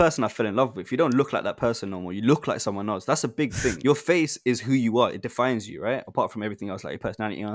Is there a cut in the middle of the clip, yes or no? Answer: yes